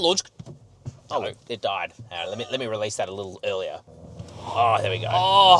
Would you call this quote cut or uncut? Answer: cut